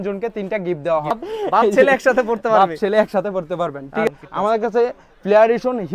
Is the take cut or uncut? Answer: cut